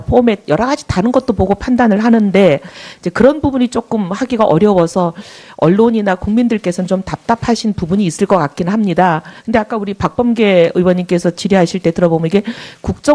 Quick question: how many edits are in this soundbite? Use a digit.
1